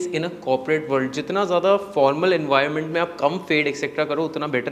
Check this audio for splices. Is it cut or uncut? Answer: uncut